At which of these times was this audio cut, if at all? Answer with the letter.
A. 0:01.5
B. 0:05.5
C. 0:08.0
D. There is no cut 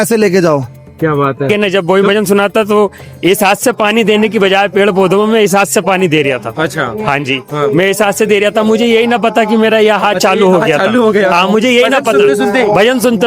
A